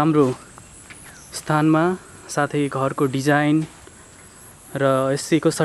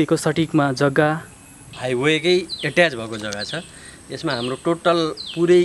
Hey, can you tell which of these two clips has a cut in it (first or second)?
second